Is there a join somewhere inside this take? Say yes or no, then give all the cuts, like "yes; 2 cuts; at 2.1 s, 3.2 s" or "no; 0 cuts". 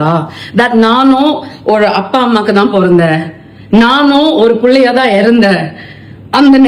no; 0 cuts